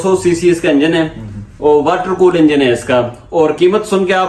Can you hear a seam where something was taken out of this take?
no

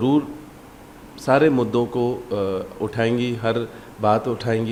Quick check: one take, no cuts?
yes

